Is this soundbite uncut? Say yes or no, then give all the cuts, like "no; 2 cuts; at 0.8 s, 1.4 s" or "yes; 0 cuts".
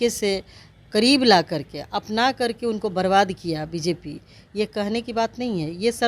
yes; 0 cuts